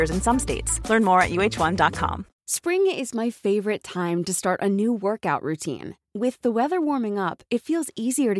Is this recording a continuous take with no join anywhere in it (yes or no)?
no